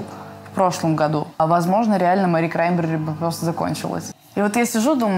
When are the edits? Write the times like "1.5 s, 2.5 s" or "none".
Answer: 1.4 s, 4.2 s